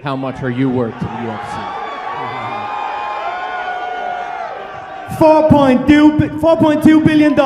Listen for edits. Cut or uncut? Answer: cut